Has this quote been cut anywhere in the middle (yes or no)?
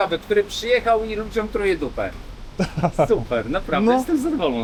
no